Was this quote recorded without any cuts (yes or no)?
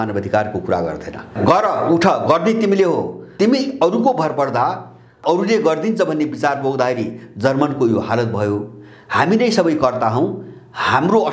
no